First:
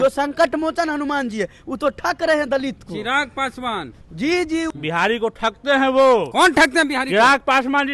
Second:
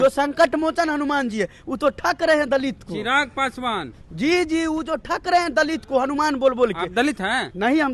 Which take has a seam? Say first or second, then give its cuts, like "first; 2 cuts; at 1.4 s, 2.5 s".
first; 1 cut; at 4.7 s